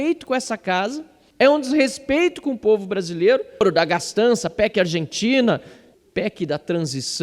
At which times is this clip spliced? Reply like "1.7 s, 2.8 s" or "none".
3.6 s